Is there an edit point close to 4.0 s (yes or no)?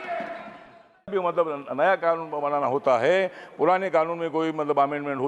no